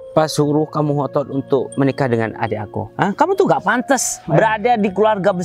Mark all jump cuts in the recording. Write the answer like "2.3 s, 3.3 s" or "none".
none